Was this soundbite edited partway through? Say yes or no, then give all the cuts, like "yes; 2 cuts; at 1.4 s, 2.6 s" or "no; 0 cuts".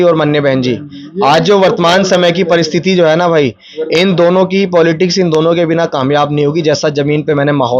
no; 0 cuts